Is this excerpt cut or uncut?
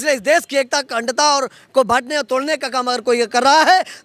uncut